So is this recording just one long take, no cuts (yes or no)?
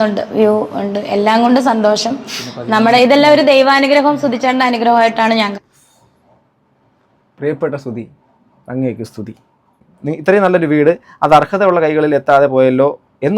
no